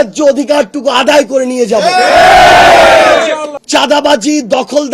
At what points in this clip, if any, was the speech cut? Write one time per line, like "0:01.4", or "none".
0:03.5

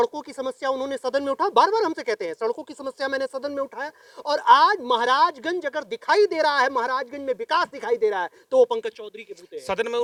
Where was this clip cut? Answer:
none

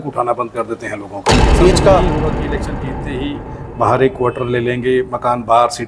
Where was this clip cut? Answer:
0:01.6

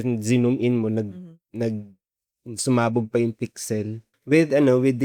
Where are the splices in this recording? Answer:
0:04.0

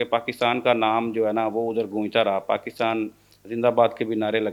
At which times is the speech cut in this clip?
none

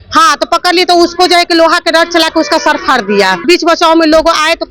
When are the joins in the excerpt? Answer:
0:03.4

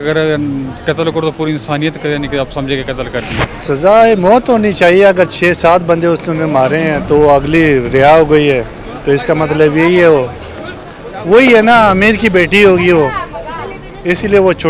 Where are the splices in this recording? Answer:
0:03.5

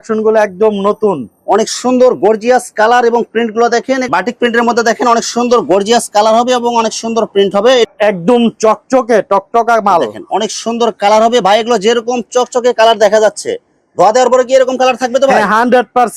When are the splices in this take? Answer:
0:04.0
0:07.9

